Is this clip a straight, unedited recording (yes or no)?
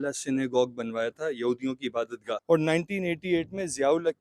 no